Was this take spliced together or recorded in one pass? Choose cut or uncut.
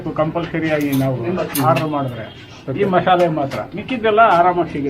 uncut